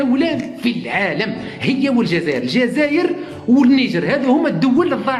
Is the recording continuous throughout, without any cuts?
yes; 0 cuts

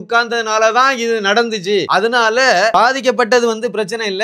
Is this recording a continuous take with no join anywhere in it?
no; 2 cuts; at 1.9 s, 2.7 s

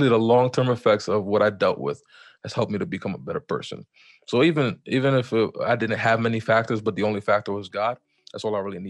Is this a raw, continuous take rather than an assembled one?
yes; 0 cuts

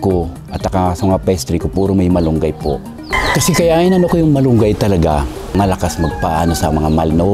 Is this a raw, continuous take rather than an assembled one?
yes; 0 cuts

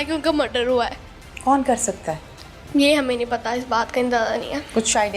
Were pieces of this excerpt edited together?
no; 0 cuts

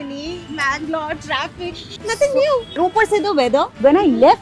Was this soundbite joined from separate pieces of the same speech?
yes; 2 cuts; at 1.9 s, 2.7 s

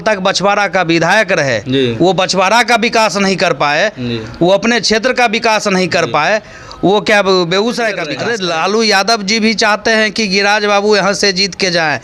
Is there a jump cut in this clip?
yes; 1 cut; at 8.1 s

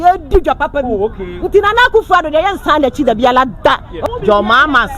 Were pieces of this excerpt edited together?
yes; 1 cut; at 3.9 s

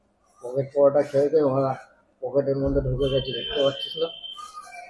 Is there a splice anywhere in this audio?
no; 0 cuts

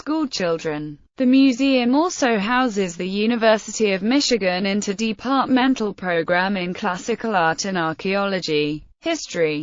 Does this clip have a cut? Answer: yes; 1 cut; at 7.0 s

